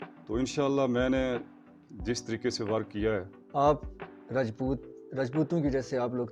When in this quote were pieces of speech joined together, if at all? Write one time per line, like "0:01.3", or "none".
0:03.4